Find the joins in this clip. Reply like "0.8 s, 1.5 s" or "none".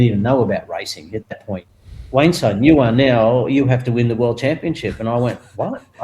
1.6 s